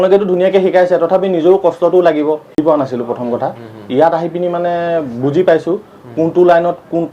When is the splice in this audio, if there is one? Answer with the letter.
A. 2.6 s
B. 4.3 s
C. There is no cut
A